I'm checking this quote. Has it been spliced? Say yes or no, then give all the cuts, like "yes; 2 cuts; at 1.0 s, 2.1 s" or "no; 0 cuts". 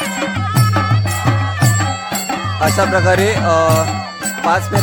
no; 0 cuts